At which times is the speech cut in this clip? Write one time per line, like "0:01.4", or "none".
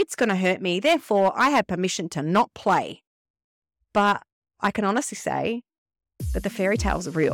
none